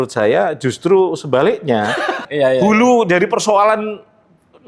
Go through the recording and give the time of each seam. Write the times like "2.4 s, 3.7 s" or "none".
2.2 s